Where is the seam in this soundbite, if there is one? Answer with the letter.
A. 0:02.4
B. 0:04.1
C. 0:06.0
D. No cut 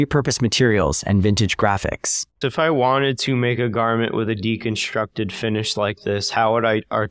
A